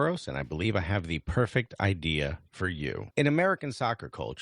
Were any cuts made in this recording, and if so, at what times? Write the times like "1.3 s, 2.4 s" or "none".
3.0 s